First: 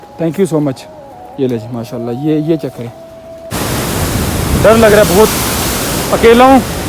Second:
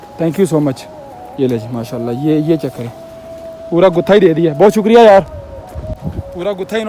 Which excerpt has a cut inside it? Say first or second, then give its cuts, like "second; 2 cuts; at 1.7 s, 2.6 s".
first; 1 cut; at 3.5 s